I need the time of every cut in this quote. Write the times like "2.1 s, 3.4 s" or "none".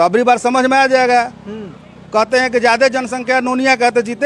none